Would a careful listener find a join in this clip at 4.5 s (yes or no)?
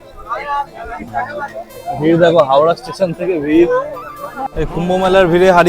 yes